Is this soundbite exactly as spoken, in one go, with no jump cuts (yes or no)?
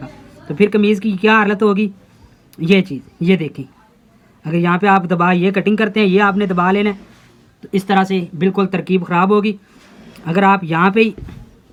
yes